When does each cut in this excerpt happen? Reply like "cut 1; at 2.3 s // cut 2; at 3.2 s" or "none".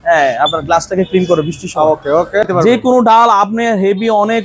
cut 1; at 2.5 s